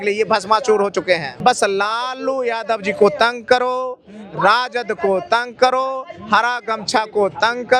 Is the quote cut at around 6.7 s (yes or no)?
no